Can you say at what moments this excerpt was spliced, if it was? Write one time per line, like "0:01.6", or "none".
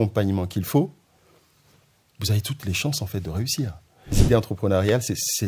0:04.2